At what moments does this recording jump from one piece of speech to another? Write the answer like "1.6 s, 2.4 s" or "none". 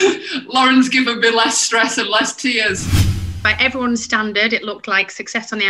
3.2 s